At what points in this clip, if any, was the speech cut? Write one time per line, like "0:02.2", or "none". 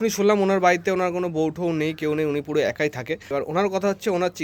0:03.2

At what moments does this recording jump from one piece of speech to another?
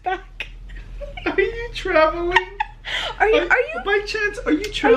none

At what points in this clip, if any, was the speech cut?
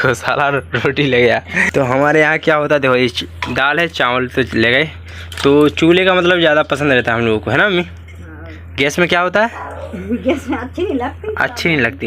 0:01.6

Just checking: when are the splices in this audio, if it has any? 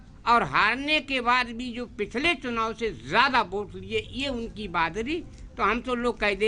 none

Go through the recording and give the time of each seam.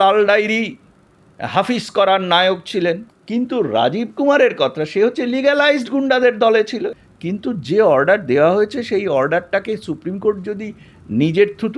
0:03.1
0:06.8

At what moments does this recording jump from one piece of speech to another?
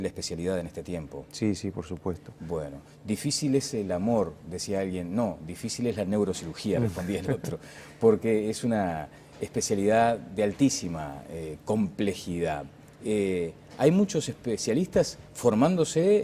0:14.9

